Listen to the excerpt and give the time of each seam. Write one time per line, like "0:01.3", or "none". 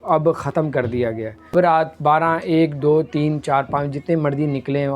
0:01.5